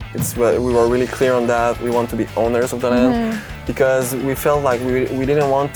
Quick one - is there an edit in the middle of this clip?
no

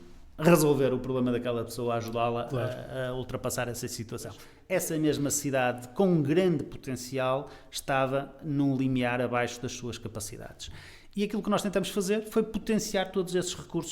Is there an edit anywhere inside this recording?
yes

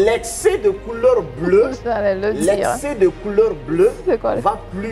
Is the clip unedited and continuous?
yes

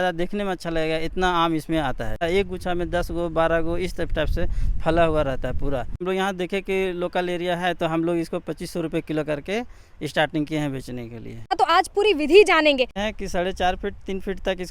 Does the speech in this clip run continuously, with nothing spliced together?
no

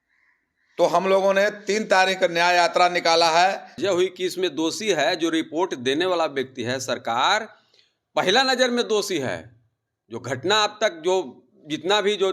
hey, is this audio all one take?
no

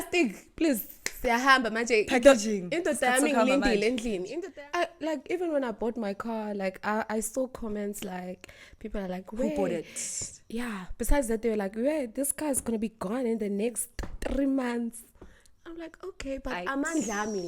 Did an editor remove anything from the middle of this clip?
yes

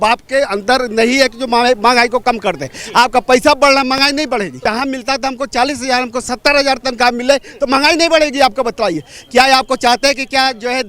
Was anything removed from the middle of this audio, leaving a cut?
yes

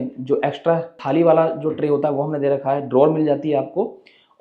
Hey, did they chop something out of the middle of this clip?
yes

